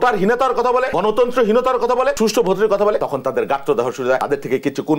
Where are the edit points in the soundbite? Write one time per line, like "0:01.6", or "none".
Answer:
0:00.9
0:02.2
0:03.0
0:04.2